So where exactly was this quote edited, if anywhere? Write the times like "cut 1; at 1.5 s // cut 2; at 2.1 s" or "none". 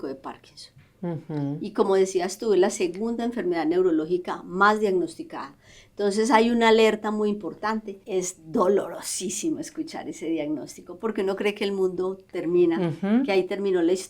cut 1; at 7.9 s